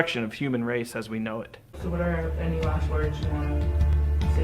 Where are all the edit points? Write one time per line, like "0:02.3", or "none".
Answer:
0:01.7